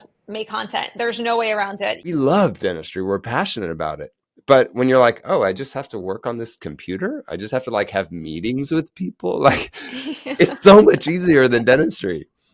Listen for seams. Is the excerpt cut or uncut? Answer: cut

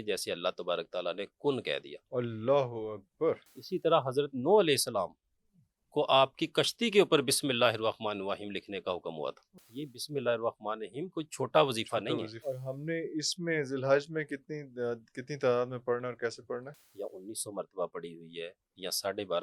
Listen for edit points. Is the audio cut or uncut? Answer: cut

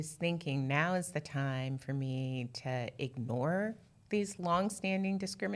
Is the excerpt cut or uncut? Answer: uncut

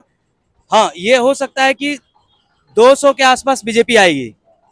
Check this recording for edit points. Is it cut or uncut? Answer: uncut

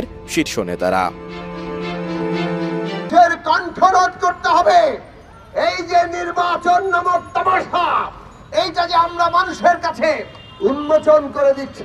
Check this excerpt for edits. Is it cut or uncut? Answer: cut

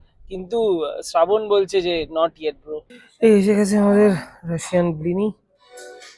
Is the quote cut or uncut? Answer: cut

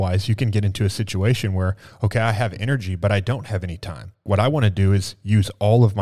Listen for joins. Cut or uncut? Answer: cut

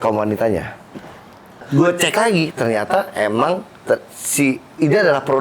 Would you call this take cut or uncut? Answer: cut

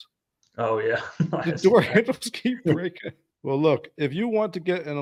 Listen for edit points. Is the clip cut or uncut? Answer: uncut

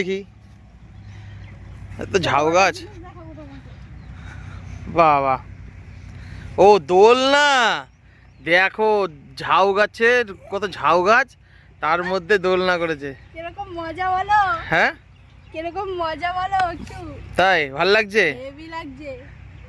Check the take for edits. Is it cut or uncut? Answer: uncut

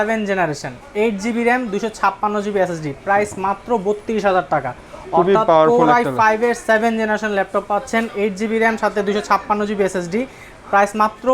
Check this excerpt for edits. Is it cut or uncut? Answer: uncut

